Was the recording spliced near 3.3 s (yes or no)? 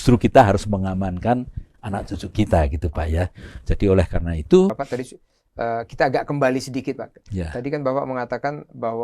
no